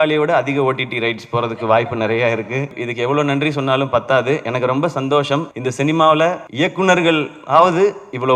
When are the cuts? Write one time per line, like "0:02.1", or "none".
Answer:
0:02.8
0:05.6
0:06.4

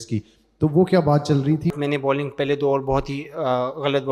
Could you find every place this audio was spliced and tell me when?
0:01.7

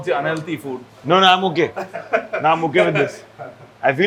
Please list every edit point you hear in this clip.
none

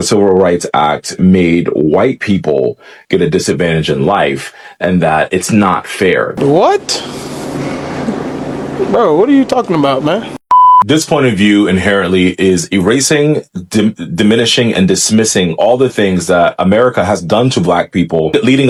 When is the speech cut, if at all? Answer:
none

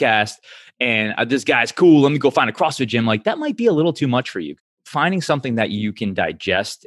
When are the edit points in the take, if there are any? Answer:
0:04.6

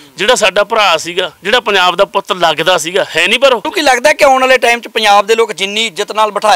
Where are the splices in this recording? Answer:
0:03.7

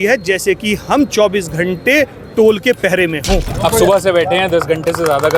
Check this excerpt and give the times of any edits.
0:03.5

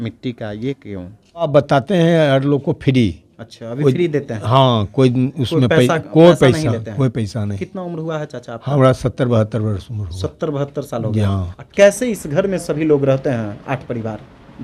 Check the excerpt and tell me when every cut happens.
0:01.5
0:11.6

